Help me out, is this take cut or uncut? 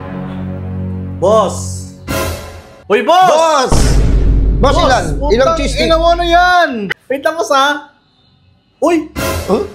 cut